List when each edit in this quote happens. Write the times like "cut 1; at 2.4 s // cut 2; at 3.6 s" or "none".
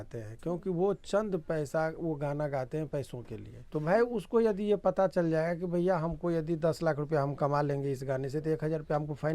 cut 1; at 3.6 s